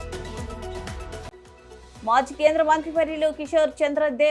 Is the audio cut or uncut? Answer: cut